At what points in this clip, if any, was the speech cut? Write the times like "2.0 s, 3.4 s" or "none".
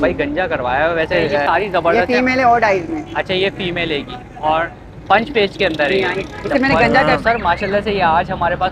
1.4 s, 7.1 s